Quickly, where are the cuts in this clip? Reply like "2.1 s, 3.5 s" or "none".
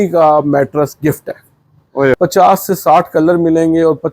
2.2 s